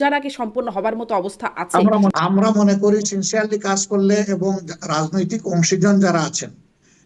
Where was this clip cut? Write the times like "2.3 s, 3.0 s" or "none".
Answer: 2.1 s